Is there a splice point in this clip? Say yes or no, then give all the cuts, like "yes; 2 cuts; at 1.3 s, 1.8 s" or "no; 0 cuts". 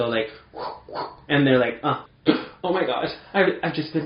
yes; 1 cut; at 1.9 s